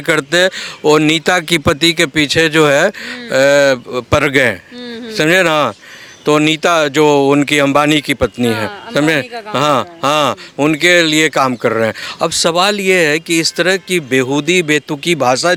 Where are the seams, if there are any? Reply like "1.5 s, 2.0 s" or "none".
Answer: none